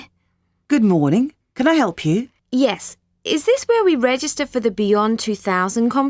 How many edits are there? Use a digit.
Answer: 1